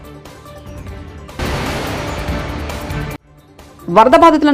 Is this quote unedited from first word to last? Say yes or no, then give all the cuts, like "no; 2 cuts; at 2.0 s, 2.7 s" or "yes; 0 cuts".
no; 1 cut; at 1.4 s